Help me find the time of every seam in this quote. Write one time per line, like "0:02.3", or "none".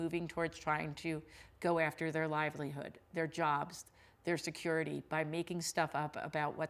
none